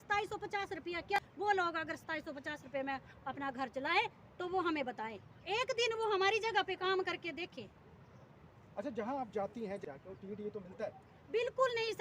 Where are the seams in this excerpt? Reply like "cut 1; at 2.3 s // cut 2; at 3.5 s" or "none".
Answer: cut 1; at 1.2 s // cut 2; at 9.8 s